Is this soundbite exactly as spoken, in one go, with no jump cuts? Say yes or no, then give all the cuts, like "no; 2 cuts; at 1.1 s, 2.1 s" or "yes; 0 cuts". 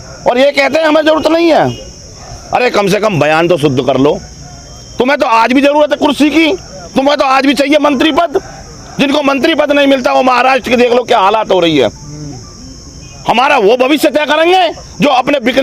yes; 0 cuts